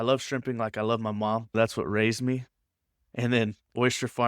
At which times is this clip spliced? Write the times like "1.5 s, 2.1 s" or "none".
1.5 s